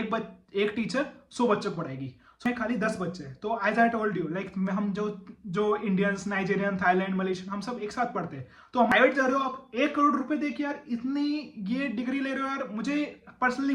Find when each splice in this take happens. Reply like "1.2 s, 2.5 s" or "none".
2.4 s, 8.9 s

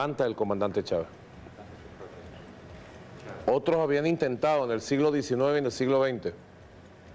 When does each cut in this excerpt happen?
none

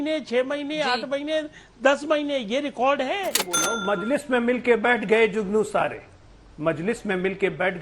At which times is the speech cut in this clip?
3.6 s

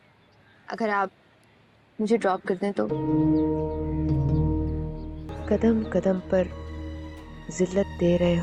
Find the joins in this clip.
5.2 s

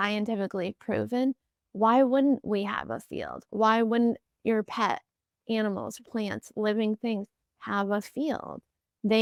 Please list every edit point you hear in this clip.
none

